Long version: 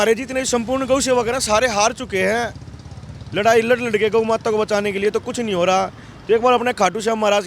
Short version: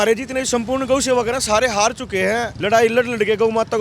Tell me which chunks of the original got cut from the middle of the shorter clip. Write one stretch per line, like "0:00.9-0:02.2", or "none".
0:02.5-0:03.3